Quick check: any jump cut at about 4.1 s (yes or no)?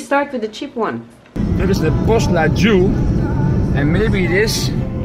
no